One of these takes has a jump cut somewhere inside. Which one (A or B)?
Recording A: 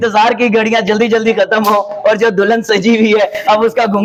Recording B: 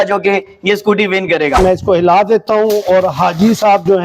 B